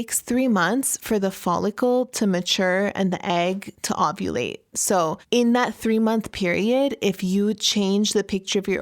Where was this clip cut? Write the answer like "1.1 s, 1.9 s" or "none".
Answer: 5.2 s